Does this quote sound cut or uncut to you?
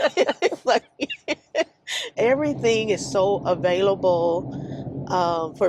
cut